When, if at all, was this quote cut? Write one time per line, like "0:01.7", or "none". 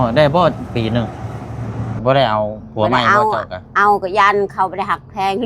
0:01.9